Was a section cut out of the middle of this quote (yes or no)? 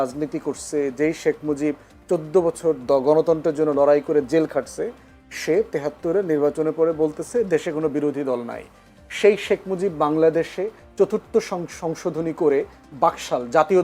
no